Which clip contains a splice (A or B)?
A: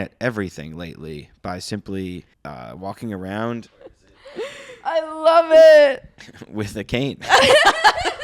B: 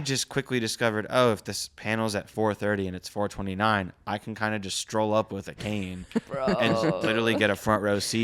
A